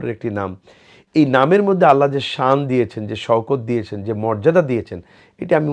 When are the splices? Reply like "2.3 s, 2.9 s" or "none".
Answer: none